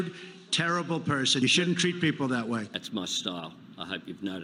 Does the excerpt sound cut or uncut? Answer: uncut